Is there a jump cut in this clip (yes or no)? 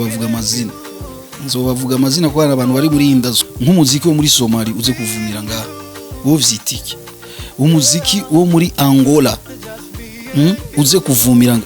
yes